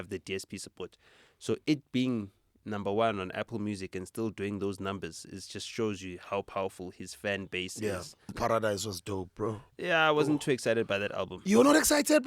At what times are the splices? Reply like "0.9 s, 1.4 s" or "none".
8.3 s